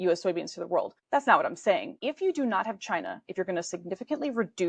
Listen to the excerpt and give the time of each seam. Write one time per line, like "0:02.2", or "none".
0:01.0
0:02.0